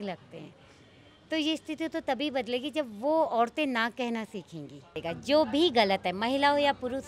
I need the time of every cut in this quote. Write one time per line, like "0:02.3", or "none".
0:05.0